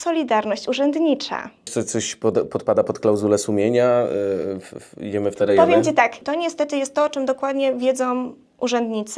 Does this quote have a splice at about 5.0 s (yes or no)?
no